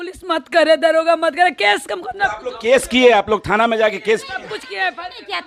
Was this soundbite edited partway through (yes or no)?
no